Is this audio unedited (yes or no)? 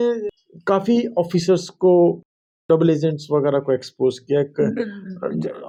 yes